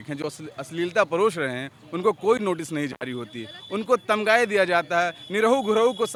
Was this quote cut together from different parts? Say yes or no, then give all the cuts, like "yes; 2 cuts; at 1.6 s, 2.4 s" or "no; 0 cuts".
no; 0 cuts